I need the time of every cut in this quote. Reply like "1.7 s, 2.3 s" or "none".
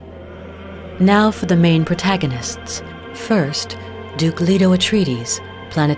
1.0 s